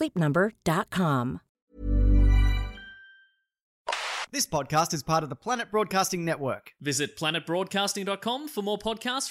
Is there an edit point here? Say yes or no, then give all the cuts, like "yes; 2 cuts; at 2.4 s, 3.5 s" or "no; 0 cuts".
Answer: yes; 2 cuts; at 1.5 s, 4.0 s